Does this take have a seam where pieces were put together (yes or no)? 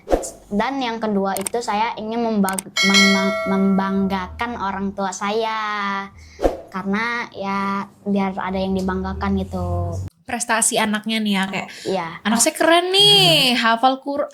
yes